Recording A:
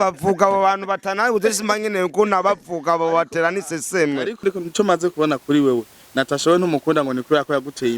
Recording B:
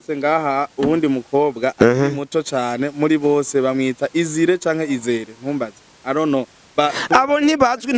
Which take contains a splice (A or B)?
A